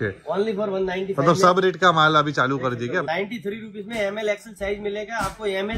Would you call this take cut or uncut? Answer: cut